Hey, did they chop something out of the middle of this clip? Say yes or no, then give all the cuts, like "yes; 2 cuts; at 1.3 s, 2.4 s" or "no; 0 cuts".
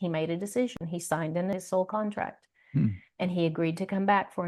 yes; 1 cut; at 1.2 s